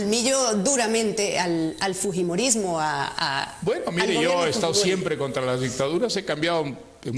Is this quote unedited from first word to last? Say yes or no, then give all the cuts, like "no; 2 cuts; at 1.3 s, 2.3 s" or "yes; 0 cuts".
no; 1 cut; at 2.1 s